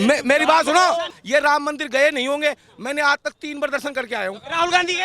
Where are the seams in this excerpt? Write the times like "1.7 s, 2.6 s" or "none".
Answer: 1.1 s